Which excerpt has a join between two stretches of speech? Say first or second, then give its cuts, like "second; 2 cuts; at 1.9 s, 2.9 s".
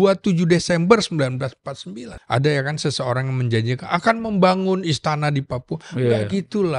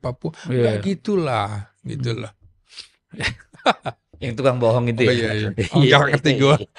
first; 1 cut; at 2.1 s